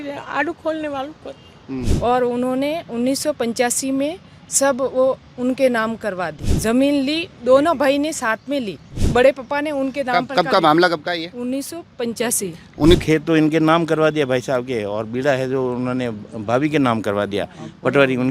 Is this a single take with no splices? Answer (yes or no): no